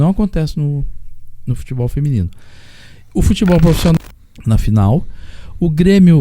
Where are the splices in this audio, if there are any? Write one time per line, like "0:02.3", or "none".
0:04.0